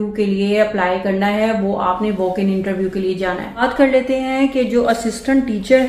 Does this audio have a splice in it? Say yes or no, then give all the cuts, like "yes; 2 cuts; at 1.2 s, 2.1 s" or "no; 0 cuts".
no; 0 cuts